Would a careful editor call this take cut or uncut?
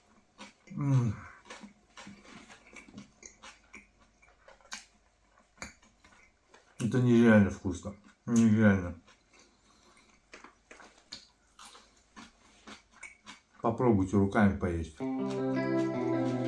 cut